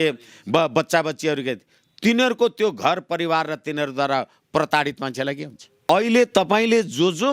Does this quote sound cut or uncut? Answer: cut